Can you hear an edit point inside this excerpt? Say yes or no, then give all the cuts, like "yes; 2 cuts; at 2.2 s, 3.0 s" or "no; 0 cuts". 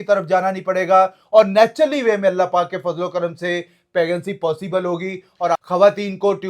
yes; 1 cut; at 5.6 s